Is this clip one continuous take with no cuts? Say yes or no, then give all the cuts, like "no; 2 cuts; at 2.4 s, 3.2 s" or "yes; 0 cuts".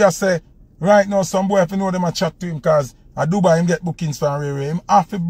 yes; 0 cuts